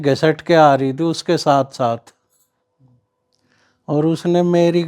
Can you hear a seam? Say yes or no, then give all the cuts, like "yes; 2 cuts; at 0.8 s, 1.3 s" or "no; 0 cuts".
no; 0 cuts